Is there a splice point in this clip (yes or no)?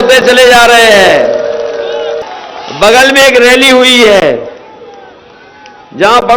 yes